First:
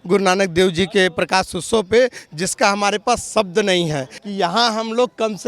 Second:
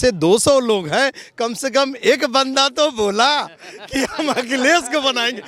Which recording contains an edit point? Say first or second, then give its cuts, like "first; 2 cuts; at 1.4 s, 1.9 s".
first; 1 cut; at 4.1 s